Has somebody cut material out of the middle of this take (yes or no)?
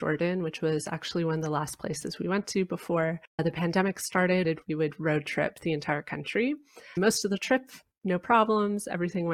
yes